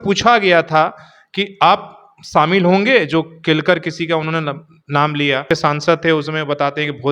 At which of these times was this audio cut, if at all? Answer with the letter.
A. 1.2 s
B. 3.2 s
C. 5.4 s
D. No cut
C